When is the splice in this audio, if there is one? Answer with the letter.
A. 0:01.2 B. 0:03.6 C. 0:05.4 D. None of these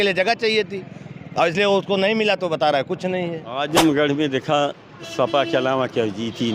B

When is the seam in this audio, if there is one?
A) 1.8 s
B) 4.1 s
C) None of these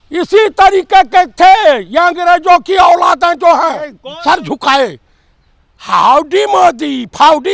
B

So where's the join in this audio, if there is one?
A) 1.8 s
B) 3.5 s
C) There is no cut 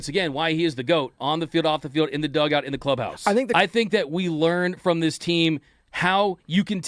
B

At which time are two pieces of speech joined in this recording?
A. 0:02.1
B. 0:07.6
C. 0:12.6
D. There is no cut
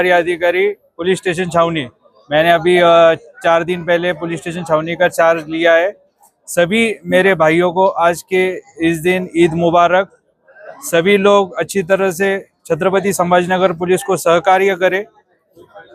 D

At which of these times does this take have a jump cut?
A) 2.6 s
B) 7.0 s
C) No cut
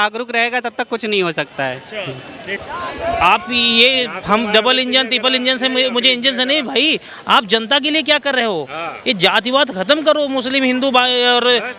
A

